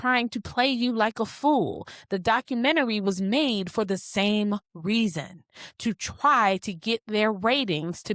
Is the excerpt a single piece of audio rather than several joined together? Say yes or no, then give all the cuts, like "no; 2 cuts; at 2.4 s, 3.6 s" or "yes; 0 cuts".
yes; 0 cuts